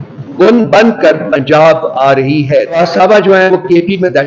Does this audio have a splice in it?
yes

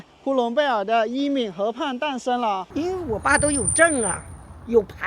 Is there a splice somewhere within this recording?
yes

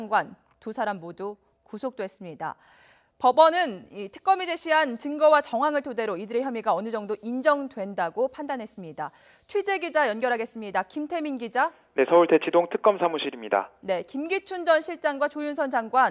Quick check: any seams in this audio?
no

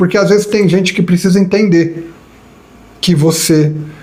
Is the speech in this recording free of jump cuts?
yes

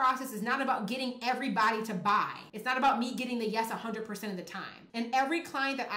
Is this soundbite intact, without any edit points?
no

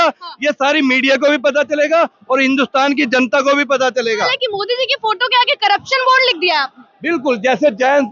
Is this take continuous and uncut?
no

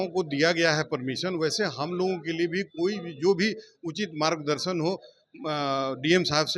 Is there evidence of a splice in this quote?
no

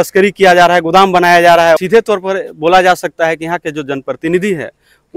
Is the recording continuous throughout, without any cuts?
no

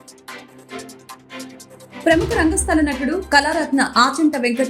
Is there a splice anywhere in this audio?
yes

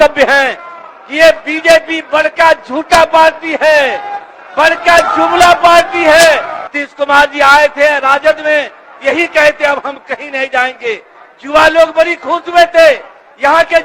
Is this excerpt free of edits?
no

